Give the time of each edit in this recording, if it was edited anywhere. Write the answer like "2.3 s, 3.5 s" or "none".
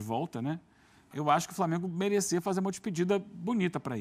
1.1 s

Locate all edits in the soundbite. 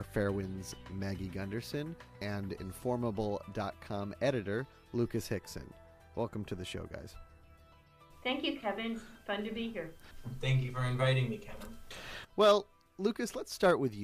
5.7 s

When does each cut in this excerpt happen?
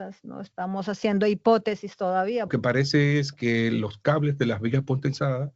2.5 s

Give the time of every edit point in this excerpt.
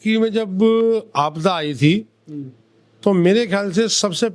none

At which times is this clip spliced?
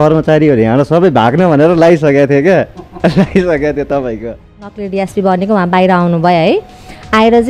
4.6 s

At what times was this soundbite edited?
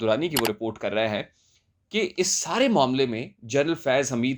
none

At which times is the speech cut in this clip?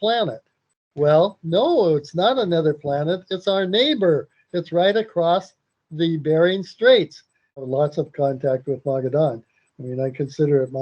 7.7 s

